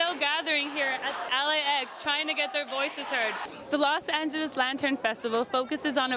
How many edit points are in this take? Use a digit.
1